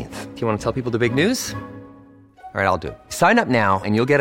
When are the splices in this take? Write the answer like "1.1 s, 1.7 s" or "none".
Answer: none